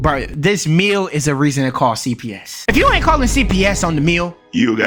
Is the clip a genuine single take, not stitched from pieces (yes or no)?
no